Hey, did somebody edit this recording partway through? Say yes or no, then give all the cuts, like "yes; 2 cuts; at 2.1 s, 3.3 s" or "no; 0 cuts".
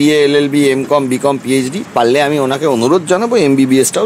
yes; 1 cut; at 1.8 s